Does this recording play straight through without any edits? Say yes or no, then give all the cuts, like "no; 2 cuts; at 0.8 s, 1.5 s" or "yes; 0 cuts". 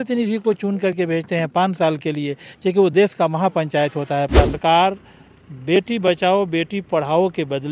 no; 1 cut; at 4.6 s